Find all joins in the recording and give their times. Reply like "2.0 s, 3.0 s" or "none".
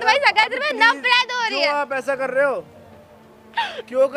none